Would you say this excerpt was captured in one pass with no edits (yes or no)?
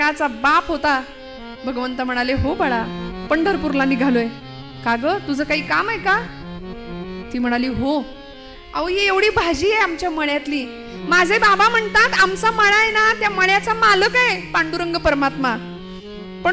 yes